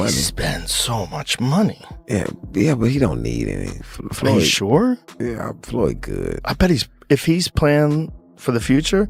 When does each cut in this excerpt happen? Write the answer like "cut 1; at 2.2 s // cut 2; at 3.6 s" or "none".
none